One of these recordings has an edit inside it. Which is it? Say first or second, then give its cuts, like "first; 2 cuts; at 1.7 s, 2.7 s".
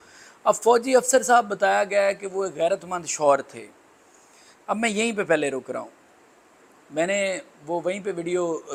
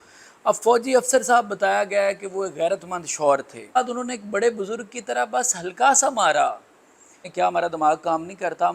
second; 2 cuts; at 3.8 s, 7.2 s